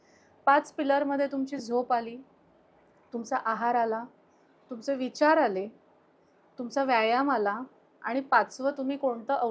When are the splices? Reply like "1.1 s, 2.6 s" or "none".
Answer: none